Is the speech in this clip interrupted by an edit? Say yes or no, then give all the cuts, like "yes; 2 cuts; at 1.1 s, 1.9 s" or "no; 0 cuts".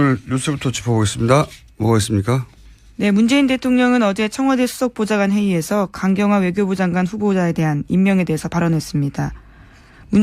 no; 0 cuts